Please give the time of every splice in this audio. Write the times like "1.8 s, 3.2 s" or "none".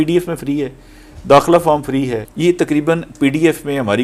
2.2 s